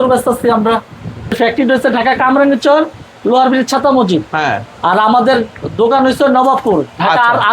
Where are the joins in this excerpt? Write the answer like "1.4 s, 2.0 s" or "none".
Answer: 1.4 s